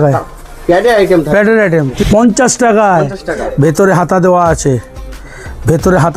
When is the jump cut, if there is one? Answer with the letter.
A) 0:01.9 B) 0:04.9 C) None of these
A